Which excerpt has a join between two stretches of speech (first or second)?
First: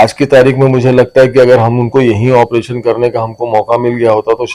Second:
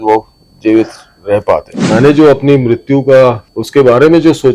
second